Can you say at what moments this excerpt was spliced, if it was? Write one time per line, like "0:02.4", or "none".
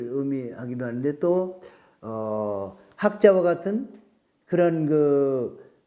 none